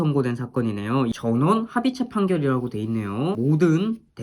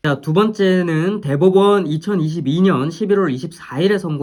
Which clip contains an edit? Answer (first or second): first